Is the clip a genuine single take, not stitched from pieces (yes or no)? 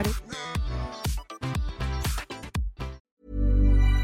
no